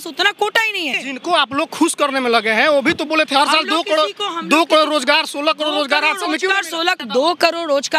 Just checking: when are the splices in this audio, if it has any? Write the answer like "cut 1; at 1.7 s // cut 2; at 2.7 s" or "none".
cut 1; at 1.0 s // cut 2; at 7.0 s